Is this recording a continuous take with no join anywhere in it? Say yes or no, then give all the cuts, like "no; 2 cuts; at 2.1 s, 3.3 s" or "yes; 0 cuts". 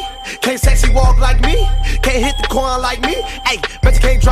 no; 1 cut; at 3.3 s